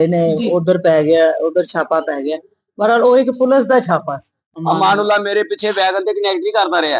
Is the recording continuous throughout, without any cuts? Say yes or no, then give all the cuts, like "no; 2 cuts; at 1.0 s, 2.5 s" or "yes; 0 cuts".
no; 1 cut; at 4.5 s